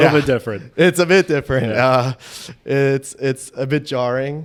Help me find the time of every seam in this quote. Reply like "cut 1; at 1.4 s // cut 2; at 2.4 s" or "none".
none

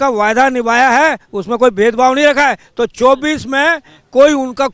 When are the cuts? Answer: none

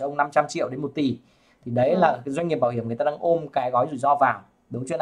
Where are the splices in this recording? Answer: none

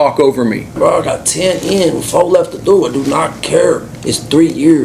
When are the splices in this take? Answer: cut 1; at 0.8 s // cut 2; at 3.9 s

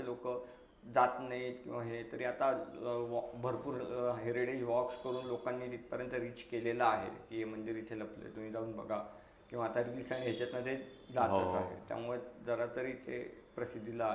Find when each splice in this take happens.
none

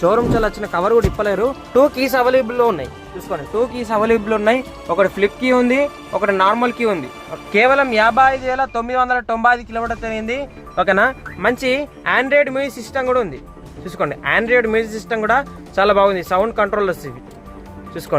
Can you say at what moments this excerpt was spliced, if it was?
cut 1; at 1.6 s // cut 2; at 7.3 s

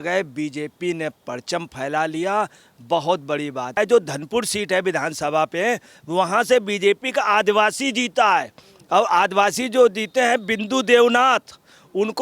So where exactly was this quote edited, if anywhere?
cut 1; at 3.7 s

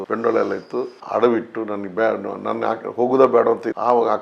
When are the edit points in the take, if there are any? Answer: none

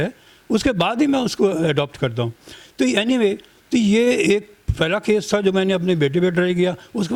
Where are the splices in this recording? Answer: none

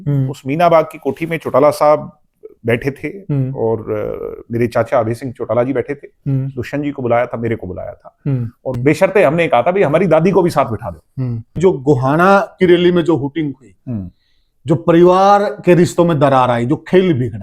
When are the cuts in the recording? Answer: cut 1; at 8.6 s // cut 2; at 11.5 s

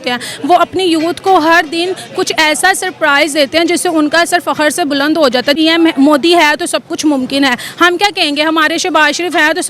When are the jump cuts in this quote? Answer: cut 1; at 5.6 s

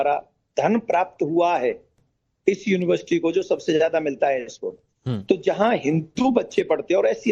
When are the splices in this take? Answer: none

